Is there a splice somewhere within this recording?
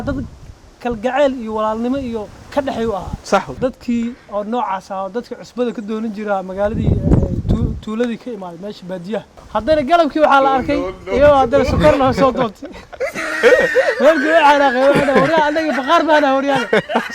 yes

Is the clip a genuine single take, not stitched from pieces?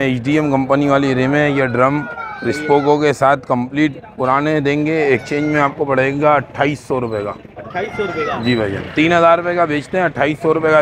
yes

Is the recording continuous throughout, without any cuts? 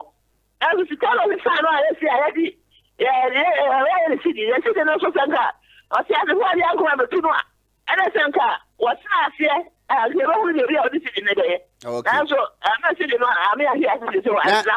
yes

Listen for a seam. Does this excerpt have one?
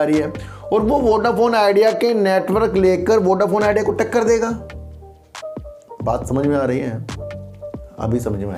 no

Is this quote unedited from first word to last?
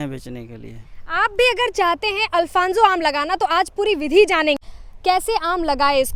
yes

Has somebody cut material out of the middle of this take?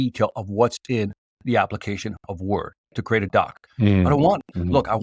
yes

